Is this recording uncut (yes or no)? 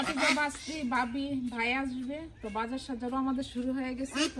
yes